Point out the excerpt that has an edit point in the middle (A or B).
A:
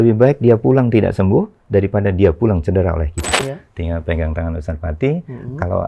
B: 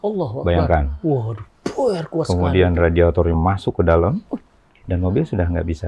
A